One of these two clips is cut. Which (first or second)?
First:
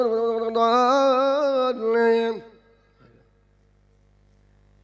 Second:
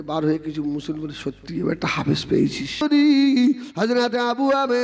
second